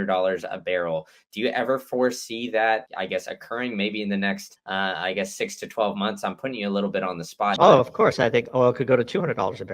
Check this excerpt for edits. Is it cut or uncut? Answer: cut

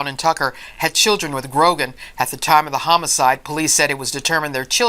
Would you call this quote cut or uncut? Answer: cut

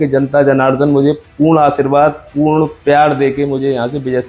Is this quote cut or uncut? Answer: uncut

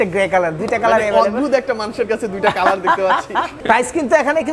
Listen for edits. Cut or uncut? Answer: uncut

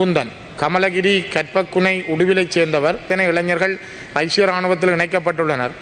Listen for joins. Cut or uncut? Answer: cut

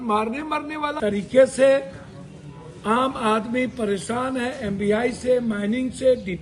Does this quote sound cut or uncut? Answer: cut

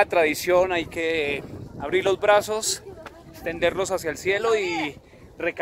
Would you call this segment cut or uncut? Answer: uncut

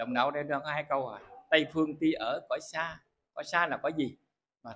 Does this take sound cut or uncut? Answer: uncut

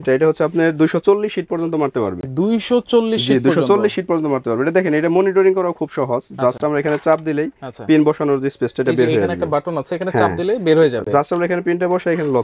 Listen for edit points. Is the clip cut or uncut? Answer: uncut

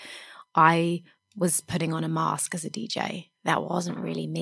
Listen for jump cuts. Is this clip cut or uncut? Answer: uncut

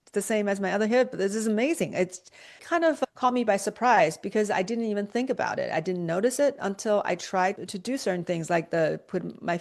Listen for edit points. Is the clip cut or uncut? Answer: uncut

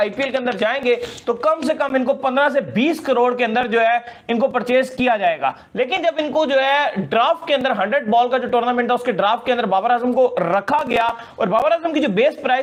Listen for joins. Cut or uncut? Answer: uncut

